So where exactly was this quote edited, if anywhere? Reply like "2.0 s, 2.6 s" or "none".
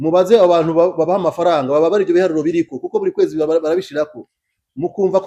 none